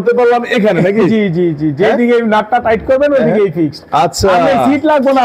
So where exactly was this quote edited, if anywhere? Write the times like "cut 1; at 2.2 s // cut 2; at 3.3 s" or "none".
none